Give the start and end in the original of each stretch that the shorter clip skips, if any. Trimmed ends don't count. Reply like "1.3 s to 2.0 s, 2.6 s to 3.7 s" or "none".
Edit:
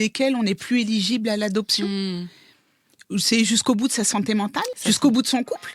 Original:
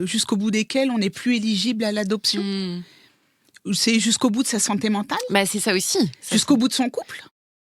5.2 s to 6.2 s